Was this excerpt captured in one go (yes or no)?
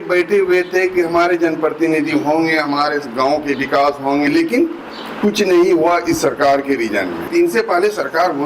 no